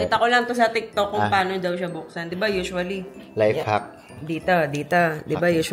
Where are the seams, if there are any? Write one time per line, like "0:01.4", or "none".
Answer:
none